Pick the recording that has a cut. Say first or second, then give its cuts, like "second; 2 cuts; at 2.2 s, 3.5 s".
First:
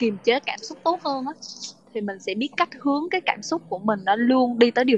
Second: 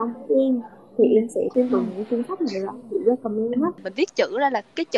second; 2 cuts; at 1.5 s, 3.9 s